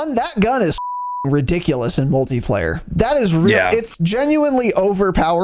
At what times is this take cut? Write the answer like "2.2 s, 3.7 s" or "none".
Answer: none

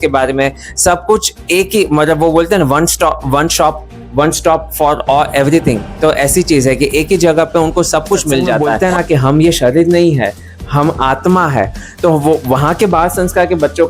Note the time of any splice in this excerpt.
8.6 s

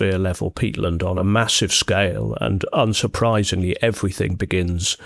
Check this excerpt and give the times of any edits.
1.2 s

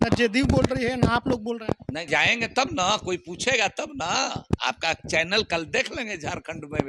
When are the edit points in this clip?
2.0 s

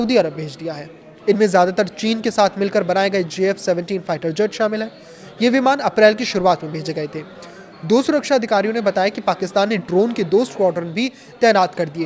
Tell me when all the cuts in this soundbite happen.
none

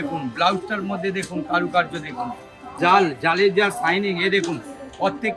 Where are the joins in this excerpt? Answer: 2.7 s

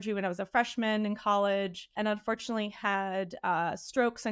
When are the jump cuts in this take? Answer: 1.9 s

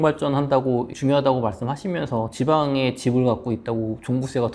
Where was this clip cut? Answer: 0.9 s

